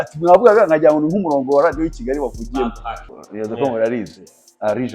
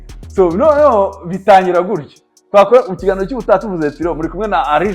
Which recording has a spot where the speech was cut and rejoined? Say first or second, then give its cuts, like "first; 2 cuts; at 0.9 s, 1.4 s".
first; 1 cut; at 3.1 s